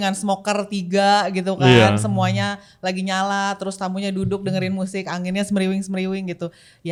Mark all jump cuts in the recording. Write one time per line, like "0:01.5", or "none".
none